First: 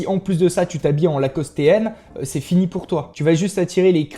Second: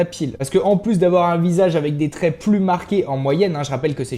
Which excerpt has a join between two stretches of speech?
first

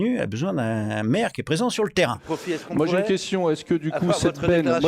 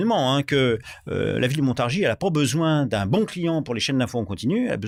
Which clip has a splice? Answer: first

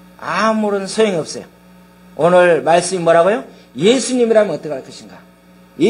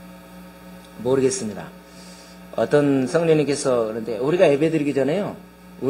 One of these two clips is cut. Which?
second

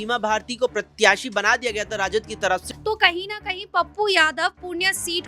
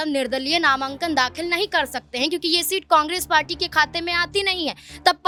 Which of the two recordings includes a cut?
first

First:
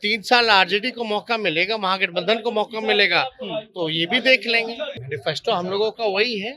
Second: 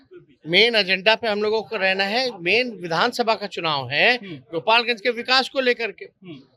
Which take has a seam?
first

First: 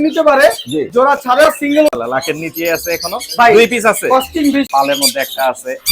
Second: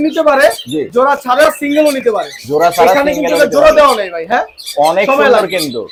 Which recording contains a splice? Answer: first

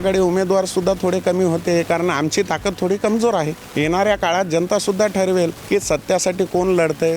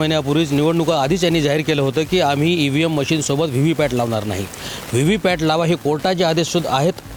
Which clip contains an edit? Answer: first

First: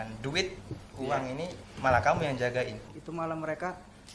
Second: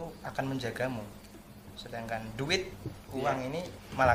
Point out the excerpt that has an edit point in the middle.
first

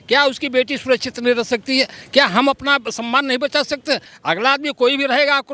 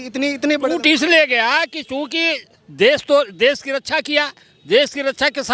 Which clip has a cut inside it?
first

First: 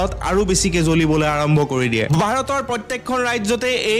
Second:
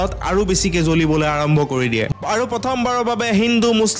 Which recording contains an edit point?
second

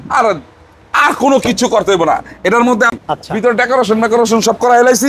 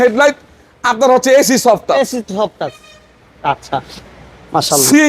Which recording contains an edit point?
first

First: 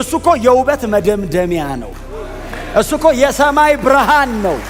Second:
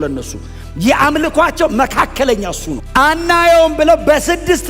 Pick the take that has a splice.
second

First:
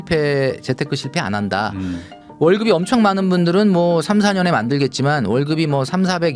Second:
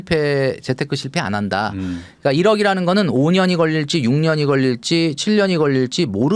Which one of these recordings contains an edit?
first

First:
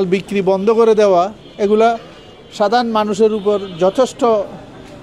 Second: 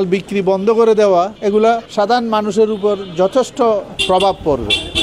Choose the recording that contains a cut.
second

